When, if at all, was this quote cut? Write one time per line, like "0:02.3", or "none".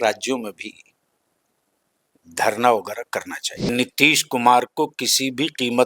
0:03.7